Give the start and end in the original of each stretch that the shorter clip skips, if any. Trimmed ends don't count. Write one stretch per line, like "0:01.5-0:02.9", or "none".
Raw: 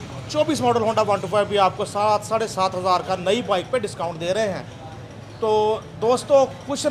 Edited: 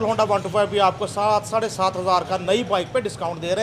none